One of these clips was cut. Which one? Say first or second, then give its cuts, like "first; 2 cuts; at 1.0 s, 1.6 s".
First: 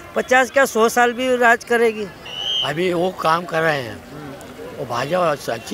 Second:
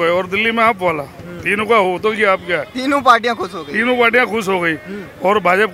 first; 1 cut; at 2.1 s